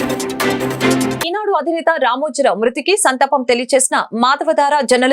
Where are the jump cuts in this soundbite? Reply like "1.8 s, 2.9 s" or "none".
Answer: 1.2 s